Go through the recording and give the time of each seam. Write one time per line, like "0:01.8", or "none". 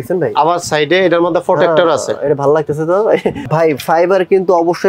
0:03.4

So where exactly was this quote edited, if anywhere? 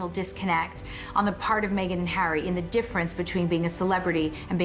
none

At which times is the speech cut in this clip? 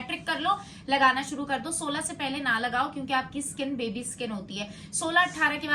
none

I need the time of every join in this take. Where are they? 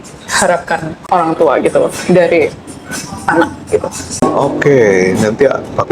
0:00.9
0:04.2

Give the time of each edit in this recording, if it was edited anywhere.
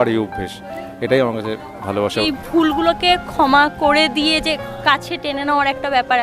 0:02.2

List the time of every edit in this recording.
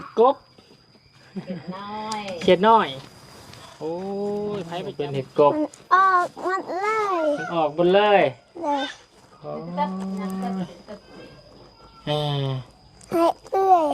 0:04.7

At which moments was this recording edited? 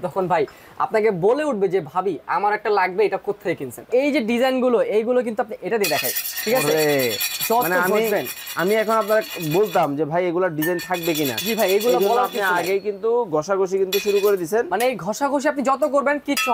0:03.8

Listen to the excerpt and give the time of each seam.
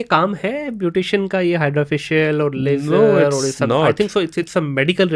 none

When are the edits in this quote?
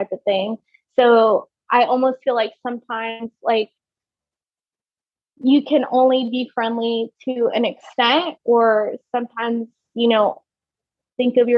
none

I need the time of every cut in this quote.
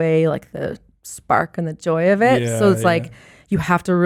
none

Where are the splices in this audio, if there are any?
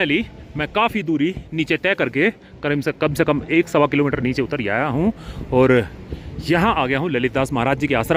none

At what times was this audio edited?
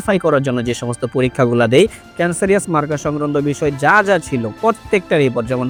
none

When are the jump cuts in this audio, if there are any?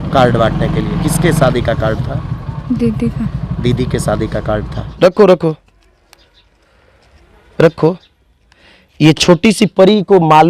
0:00.9
0:04.8

